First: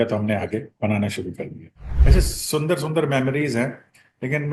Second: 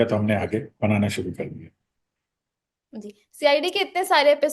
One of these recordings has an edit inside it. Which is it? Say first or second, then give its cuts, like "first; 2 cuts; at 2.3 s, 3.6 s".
first; 1 cut; at 1.9 s